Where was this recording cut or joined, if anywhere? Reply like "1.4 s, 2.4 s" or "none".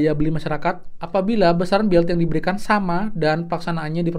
0.9 s